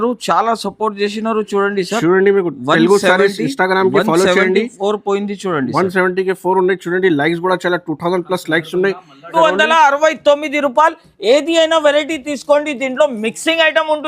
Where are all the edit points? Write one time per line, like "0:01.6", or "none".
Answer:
0:09.3